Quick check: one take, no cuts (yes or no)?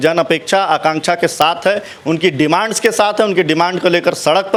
yes